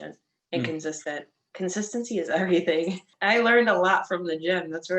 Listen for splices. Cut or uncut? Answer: cut